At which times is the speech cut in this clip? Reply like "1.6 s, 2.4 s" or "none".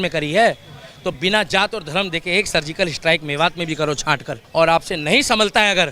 4.3 s